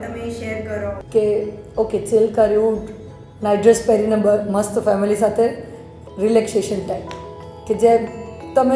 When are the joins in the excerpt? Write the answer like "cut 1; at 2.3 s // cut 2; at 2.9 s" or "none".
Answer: cut 1; at 1.0 s